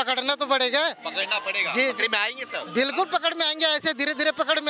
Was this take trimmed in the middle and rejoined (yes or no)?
no